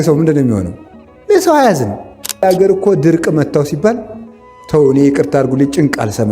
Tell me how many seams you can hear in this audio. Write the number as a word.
one